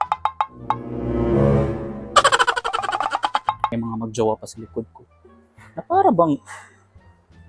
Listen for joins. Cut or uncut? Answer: cut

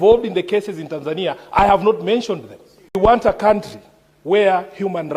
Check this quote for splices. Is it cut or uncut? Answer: cut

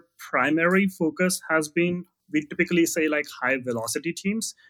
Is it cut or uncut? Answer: cut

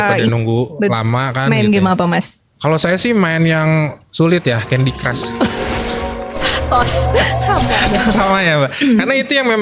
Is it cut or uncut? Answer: uncut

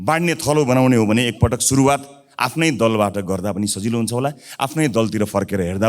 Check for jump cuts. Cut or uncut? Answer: uncut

